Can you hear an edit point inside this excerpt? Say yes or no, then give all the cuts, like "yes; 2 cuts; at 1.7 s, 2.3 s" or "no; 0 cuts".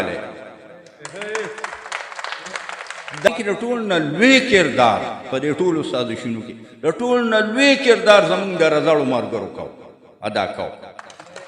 yes; 1 cut; at 3.3 s